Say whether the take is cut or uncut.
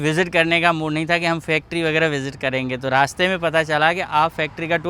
uncut